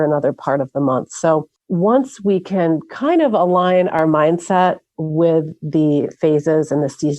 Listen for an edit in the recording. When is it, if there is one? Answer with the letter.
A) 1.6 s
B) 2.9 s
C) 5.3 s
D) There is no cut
A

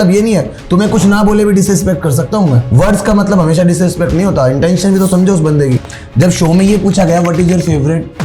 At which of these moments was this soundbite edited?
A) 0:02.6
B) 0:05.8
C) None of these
A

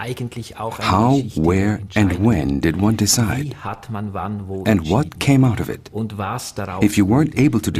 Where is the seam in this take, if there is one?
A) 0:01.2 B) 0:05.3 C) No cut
B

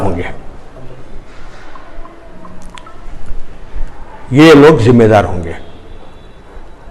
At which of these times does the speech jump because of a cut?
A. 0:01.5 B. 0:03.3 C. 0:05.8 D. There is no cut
A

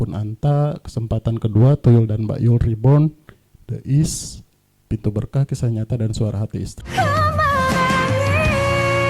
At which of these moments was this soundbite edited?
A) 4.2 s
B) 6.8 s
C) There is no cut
B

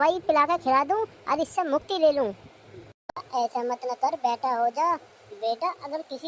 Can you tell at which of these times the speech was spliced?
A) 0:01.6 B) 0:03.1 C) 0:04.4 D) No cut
B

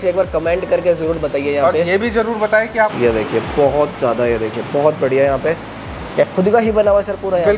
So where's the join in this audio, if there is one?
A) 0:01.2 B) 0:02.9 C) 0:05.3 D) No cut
B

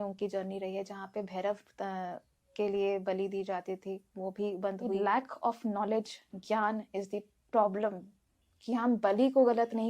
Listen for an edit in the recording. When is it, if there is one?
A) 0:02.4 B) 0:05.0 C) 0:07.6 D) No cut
B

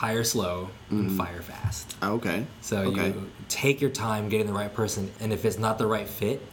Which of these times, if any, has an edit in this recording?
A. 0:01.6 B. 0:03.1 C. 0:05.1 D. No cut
C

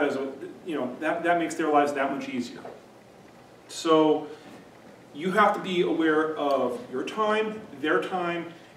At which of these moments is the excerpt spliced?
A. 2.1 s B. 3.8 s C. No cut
B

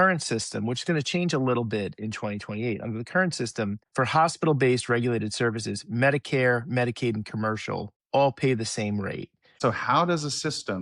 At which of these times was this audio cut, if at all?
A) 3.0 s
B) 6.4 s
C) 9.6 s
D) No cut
C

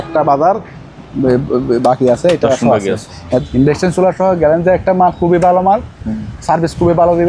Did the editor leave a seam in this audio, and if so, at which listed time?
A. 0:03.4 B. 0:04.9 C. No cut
A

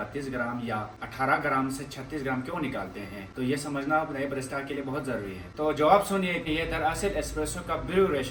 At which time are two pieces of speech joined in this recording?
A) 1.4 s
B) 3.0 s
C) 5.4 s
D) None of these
D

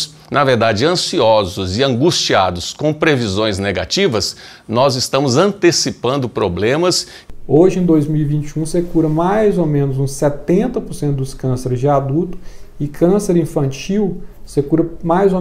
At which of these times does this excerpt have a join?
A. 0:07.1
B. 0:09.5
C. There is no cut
A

